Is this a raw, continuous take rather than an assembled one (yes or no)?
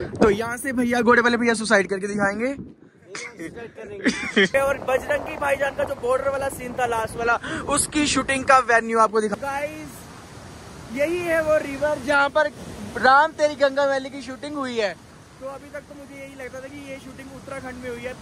no